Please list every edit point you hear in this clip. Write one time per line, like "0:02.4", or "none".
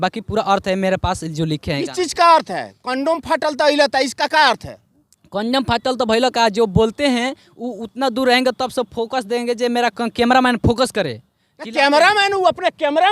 none